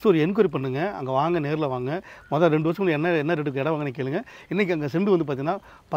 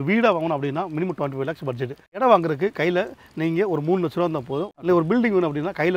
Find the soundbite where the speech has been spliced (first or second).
second